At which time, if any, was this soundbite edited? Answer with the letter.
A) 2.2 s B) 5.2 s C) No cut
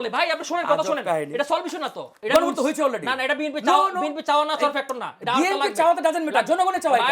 A